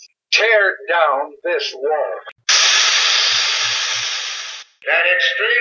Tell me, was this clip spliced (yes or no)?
yes